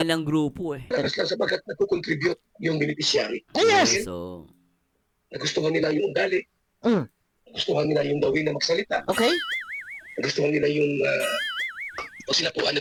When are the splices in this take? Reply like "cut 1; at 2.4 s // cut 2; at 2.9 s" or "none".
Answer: none